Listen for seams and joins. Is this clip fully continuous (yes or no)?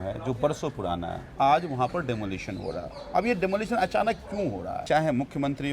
no